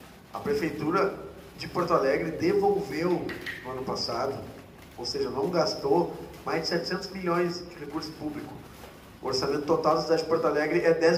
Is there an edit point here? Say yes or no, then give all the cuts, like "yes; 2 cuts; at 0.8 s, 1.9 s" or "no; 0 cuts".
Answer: no; 0 cuts